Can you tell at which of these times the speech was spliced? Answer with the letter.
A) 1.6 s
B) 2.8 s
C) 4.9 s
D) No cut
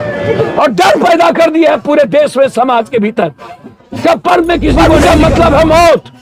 C